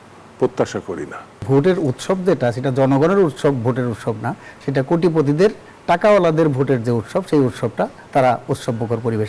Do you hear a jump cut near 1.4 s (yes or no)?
yes